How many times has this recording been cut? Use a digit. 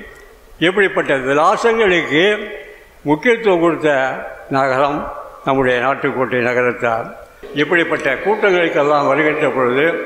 1